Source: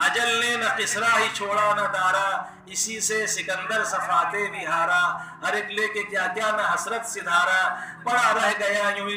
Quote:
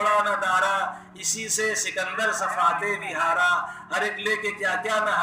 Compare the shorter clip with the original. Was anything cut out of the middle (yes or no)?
no